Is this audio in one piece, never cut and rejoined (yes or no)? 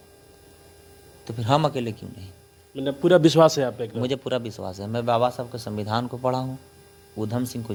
yes